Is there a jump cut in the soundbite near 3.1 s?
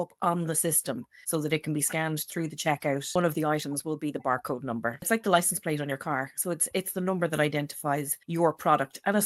yes; 2 cuts; at 3.1 s, 5.1 s

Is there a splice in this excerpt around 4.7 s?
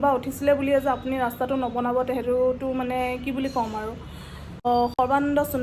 yes; 1 cut; at 4.7 s

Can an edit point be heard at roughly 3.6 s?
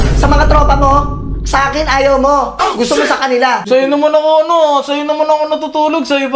yes; 1 cut; at 3.6 s

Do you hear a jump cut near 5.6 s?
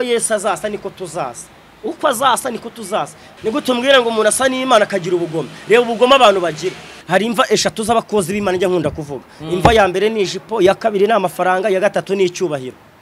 no; 2 cuts; at 3.2 s, 6.9 s

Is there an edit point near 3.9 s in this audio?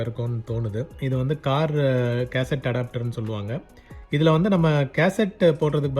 no; 1 cut; at 1.0 s

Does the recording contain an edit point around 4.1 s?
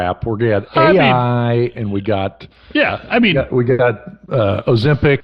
no; 0 cuts

